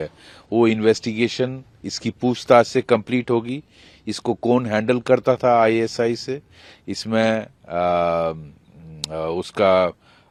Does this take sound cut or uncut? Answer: uncut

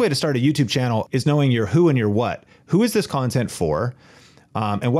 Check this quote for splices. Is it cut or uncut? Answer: cut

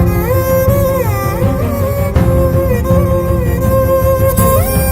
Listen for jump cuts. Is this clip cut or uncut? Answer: uncut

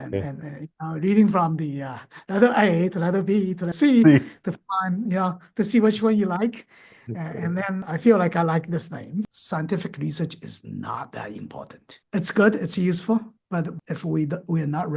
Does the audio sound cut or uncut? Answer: cut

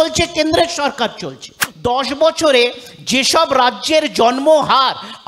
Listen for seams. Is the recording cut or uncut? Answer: cut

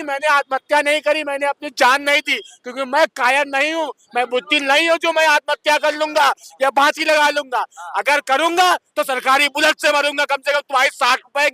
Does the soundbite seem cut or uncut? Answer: uncut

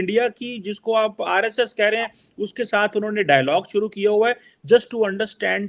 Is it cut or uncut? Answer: uncut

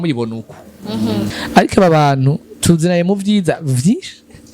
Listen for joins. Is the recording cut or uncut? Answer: cut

